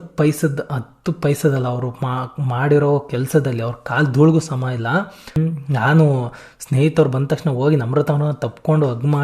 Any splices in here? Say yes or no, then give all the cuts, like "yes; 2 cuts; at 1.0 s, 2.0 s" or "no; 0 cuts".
yes; 1 cut; at 5.2 s